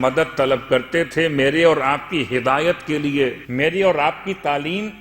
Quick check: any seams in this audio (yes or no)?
yes